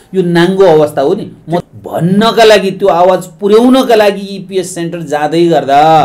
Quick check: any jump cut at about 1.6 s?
yes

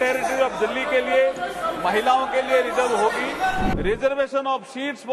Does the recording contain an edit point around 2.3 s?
no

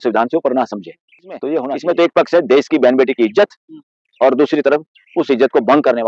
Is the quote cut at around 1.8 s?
yes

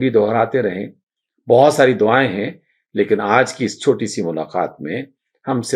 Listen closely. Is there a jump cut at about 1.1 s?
no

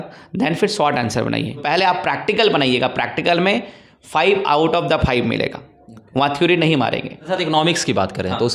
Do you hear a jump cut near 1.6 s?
yes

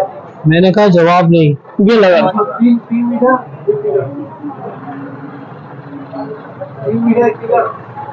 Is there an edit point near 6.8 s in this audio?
no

